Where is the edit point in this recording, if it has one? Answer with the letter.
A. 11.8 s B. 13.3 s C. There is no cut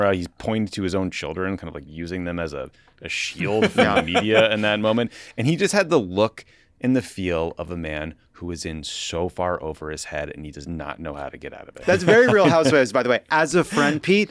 A